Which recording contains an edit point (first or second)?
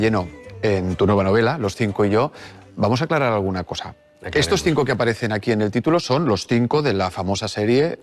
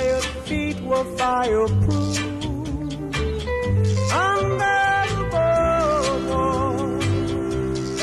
first